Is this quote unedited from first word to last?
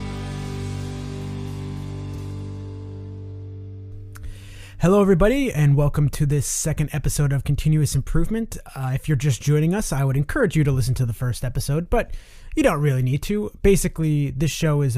no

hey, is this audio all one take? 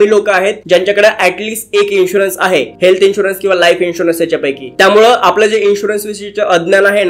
yes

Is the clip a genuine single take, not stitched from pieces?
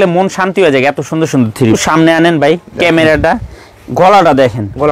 no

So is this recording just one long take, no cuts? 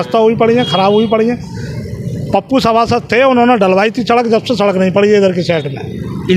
yes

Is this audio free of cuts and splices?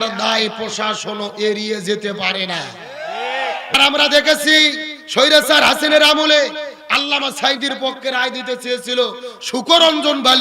no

